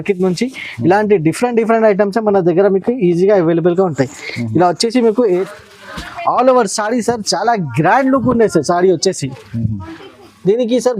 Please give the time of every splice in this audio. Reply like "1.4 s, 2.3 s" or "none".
5.5 s